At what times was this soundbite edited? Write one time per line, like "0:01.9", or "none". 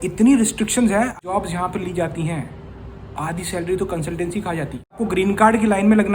0:01.2
0:05.0